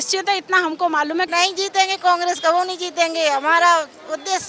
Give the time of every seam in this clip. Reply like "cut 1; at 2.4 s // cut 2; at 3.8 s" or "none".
cut 1; at 1.3 s